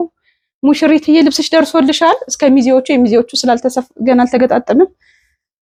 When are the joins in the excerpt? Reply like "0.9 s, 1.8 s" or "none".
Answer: none

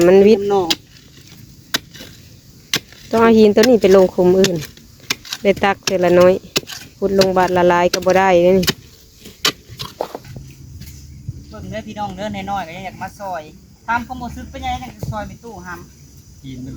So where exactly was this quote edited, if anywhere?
10.2 s

